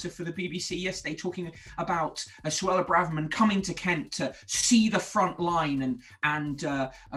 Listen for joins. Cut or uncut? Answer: uncut